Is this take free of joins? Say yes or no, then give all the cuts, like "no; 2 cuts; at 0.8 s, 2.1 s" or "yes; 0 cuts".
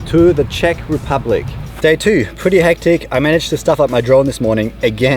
no; 1 cut; at 1.6 s